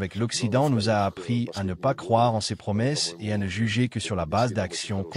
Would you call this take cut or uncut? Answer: uncut